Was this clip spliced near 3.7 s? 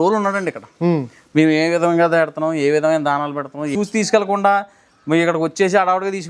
yes; 1 cut; at 3.7 s

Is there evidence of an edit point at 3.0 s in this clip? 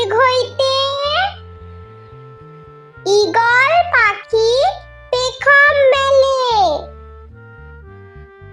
yes; 2 cuts; at 1.4 s, 3.0 s

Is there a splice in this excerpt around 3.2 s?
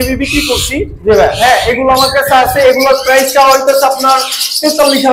no; 0 cuts

